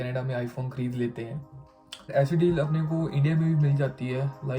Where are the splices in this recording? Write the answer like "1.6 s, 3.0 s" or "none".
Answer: 2.1 s